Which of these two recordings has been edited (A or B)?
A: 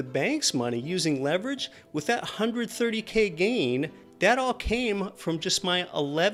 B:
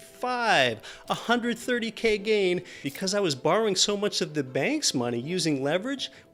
B